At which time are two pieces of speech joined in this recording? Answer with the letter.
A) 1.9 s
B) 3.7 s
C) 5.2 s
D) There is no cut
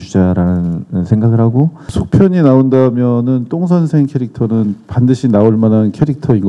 A